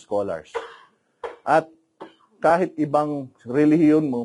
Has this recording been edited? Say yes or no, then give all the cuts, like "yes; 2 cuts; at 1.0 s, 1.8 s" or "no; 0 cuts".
no; 0 cuts